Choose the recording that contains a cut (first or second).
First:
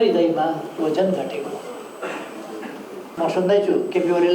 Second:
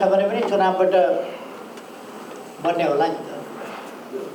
first